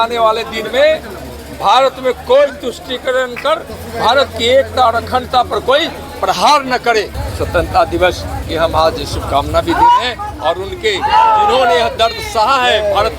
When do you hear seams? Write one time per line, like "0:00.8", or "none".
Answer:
0:07.2